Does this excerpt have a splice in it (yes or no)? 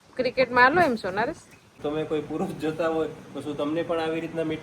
yes